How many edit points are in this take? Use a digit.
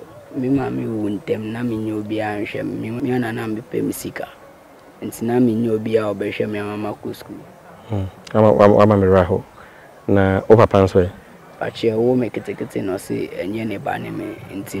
1